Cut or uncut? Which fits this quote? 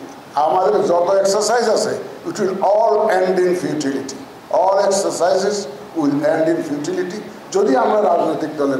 uncut